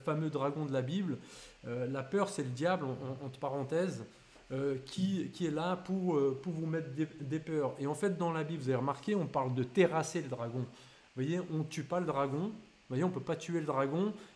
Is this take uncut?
yes; 0 cuts

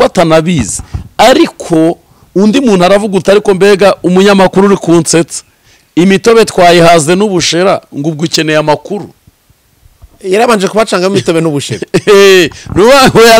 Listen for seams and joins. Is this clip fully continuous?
yes; 0 cuts

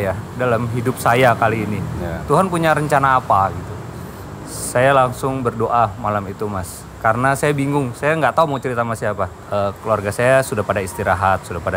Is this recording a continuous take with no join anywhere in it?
yes; 0 cuts

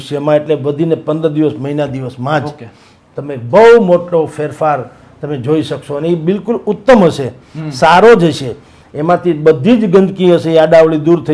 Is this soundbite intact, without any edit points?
yes; 0 cuts

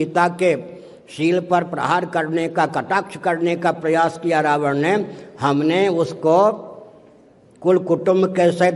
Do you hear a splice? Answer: no; 0 cuts

